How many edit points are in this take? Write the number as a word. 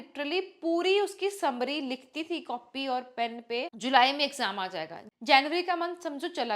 one